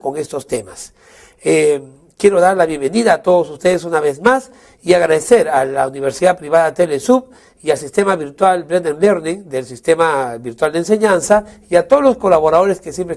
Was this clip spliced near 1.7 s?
no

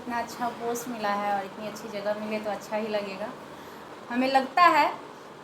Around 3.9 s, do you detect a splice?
yes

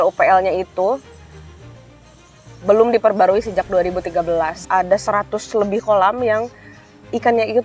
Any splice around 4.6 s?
yes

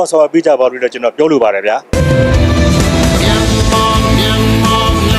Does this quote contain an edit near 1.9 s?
yes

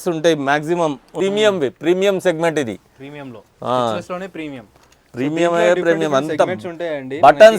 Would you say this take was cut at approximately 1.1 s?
yes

